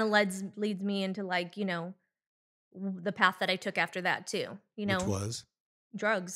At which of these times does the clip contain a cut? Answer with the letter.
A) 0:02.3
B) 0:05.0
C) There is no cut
C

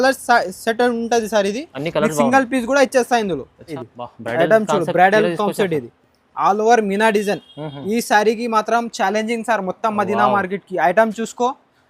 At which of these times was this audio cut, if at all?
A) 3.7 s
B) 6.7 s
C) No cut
A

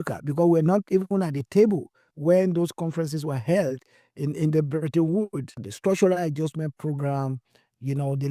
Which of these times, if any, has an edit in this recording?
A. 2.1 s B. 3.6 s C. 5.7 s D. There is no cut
C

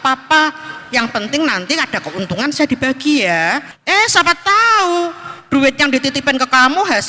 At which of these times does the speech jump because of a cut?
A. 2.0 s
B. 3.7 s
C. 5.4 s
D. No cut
B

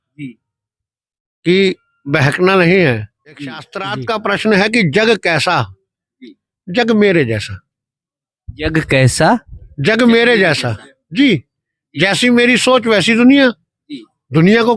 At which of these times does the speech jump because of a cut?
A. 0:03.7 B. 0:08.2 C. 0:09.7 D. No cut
A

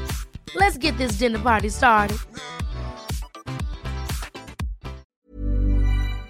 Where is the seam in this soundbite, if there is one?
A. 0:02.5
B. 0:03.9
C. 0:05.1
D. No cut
C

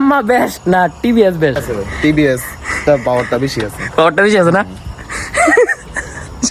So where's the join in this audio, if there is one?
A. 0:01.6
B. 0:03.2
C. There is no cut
A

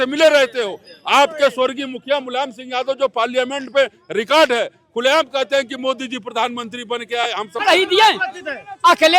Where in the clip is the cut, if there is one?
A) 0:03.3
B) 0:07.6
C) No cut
B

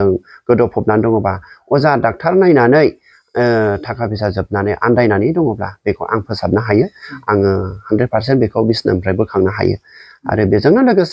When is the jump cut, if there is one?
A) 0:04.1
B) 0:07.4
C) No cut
C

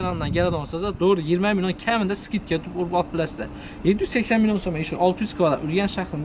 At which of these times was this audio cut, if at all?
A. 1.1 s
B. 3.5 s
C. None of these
C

